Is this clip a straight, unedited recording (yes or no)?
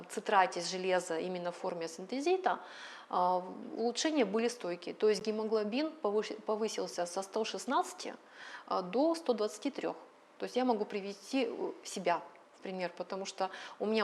yes